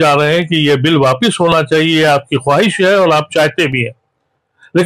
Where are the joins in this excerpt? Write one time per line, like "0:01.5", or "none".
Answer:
none